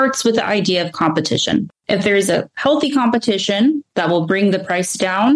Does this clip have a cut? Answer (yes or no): yes